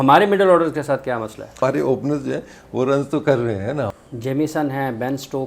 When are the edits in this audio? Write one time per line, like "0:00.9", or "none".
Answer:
0:01.5
0:03.9

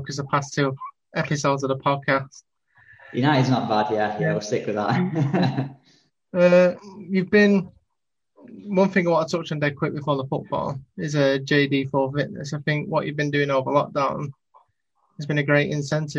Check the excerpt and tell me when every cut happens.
none

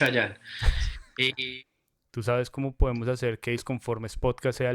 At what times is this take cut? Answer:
0:01.4

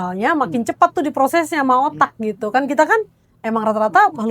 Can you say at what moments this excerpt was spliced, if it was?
none

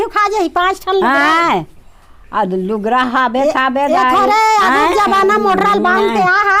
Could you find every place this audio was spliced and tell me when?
none

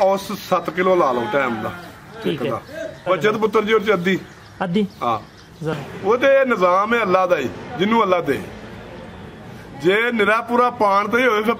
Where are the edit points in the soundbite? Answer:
0:03.0
0:05.7

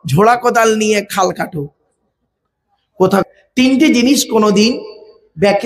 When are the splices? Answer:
0:03.2

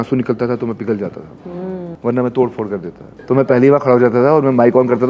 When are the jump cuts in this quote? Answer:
0:01.9
0:03.1

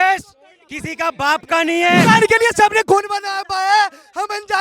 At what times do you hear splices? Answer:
0:02.0

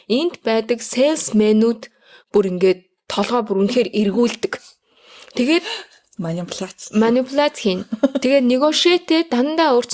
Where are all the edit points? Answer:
none

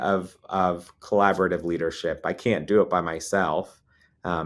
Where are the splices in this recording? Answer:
none

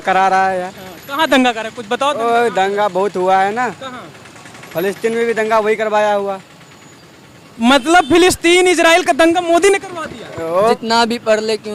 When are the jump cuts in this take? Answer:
0:10.7

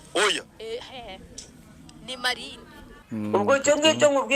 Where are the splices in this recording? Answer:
0:02.9

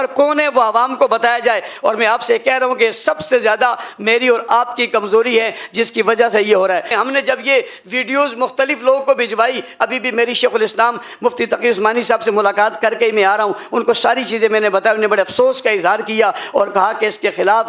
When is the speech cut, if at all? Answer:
0:06.9

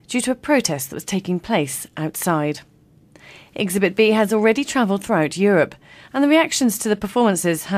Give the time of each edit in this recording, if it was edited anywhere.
0:06.8

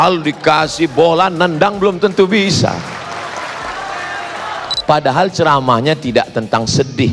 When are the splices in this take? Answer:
0:04.8

